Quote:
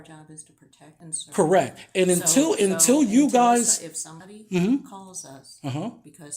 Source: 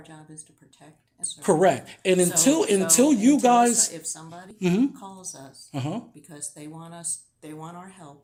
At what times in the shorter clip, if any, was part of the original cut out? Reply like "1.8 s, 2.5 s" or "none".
1.1 s